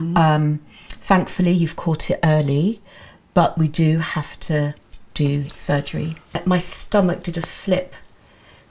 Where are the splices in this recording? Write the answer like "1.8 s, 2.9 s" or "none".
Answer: 6.4 s